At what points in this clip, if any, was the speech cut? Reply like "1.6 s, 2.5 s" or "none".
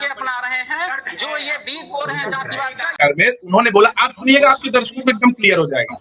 2.8 s